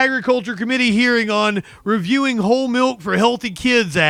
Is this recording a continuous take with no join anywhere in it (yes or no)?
yes